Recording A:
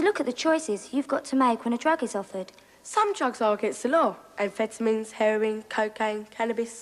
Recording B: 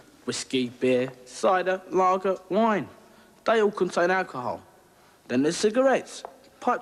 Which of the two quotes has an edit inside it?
A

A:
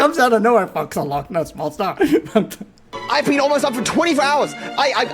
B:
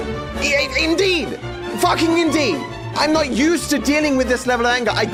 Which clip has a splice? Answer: A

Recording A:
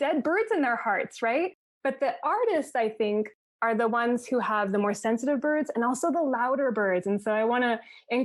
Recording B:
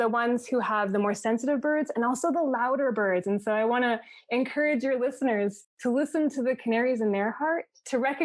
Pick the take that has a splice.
B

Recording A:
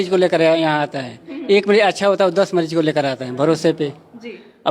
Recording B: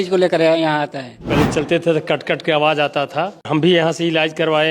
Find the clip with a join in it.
B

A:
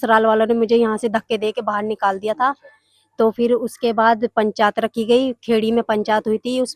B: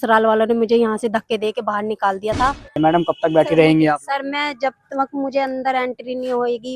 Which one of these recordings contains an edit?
B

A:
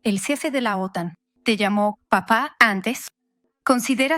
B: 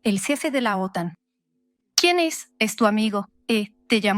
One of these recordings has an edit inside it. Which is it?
A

